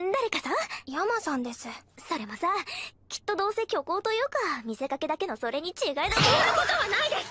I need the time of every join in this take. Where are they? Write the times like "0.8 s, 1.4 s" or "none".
6.2 s